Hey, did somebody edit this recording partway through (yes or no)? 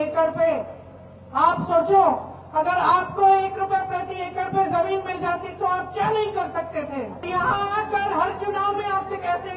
yes